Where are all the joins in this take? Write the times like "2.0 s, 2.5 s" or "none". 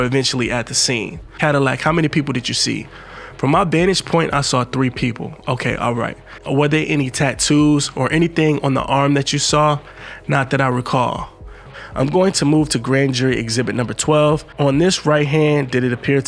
1.4 s, 6.3 s, 11.7 s